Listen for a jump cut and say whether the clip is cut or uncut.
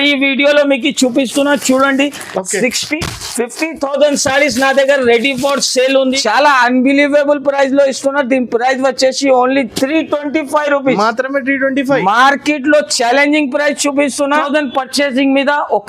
cut